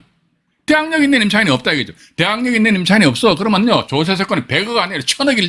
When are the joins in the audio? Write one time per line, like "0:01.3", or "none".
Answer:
none